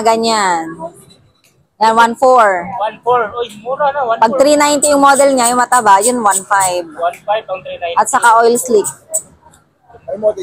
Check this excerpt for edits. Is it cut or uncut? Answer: uncut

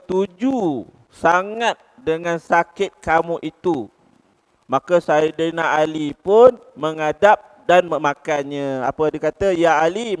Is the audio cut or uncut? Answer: uncut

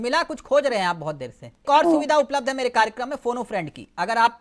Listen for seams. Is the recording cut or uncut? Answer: cut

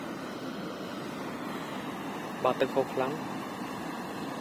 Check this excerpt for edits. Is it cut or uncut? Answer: uncut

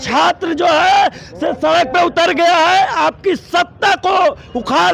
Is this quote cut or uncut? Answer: uncut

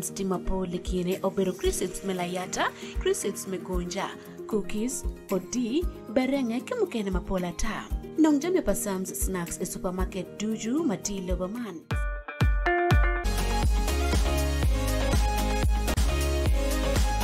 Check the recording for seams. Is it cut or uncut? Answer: cut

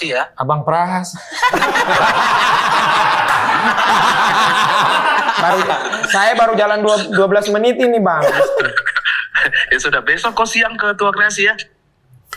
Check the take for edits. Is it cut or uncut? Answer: uncut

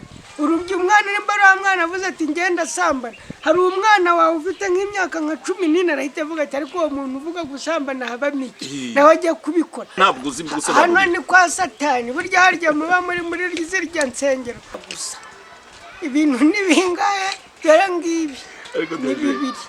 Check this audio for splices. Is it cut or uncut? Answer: cut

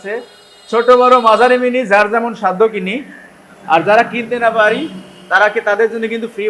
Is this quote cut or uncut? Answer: uncut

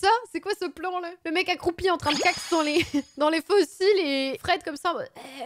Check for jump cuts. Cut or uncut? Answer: cut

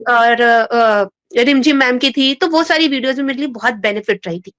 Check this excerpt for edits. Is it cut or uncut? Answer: uncut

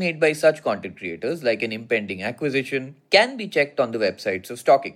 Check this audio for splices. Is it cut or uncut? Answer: cut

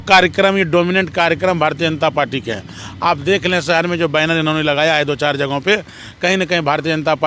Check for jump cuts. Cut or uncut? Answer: uncut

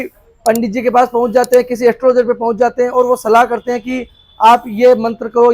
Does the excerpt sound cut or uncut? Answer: uncut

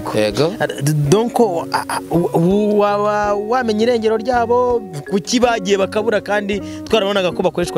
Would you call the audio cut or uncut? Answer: uncut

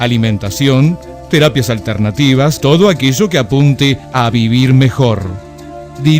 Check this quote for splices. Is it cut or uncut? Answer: cut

